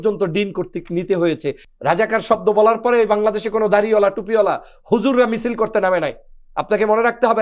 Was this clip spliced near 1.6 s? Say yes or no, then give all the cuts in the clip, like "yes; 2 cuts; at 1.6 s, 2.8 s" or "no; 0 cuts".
yes; 1 cut; at 1.6 s